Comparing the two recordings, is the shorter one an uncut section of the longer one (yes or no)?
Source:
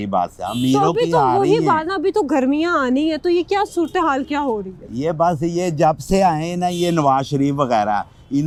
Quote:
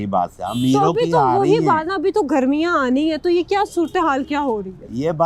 yes